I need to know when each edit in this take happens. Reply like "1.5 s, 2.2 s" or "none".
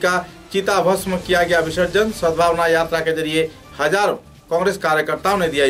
none